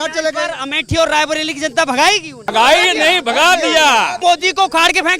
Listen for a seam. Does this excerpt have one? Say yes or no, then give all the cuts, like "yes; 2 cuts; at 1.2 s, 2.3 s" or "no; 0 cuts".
yes; 2 cuts; at 2.5 s, 4.2 s